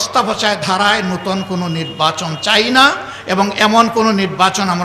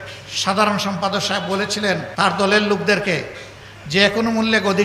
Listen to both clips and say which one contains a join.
second; 1 cut; at 2.1 s

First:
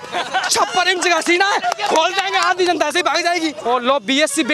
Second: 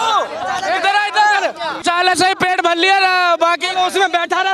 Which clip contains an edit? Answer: first; 1 cut; at 3.6 s

